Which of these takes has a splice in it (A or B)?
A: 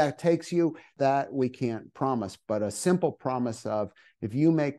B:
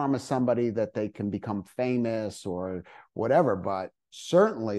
A